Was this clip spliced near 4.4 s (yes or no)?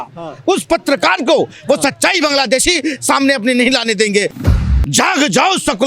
yes